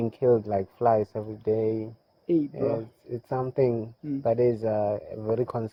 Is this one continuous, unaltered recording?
yes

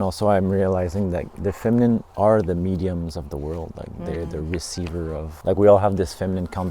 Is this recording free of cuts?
no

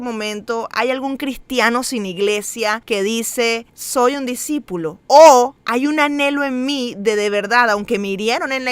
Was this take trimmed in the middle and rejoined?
yes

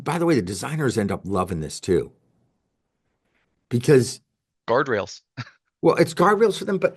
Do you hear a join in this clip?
no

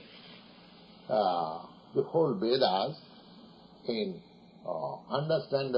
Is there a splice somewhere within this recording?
yes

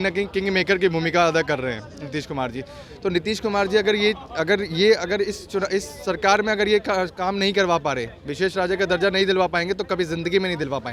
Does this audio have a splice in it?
no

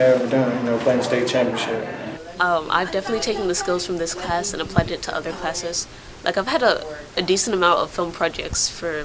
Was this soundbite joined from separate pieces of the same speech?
yes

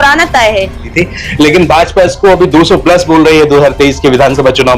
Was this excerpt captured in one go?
no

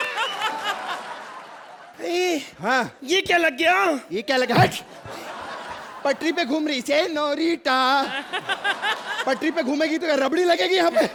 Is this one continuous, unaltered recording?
yes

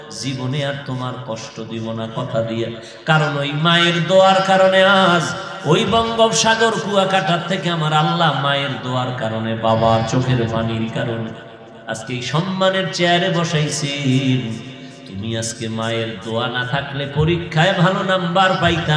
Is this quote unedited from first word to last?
yes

